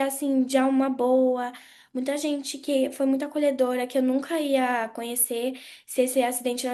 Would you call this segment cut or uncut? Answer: uncut